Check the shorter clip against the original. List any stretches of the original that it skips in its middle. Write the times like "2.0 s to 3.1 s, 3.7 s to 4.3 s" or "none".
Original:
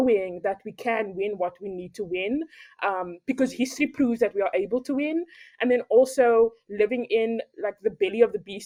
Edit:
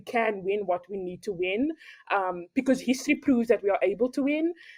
none